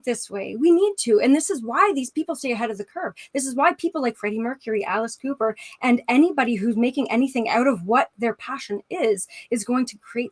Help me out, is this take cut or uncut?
uncut